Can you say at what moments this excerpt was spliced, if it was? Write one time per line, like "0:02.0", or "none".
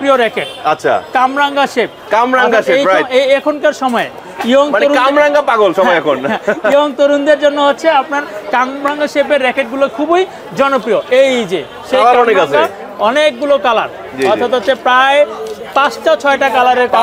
none